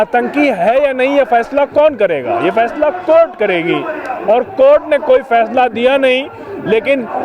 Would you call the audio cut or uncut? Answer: uncut